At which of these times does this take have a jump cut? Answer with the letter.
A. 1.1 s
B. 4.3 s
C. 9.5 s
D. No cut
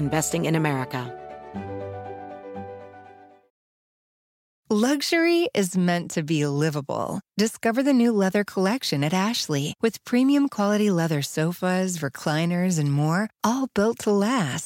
A